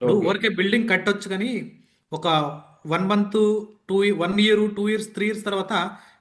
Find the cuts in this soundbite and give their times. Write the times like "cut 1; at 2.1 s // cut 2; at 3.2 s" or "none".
none